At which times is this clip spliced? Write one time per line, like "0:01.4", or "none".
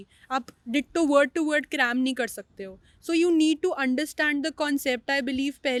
none